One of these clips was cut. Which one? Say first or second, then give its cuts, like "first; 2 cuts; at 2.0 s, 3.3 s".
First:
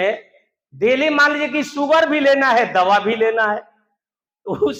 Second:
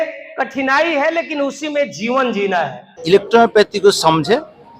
second; 1 cut; at 3.0 s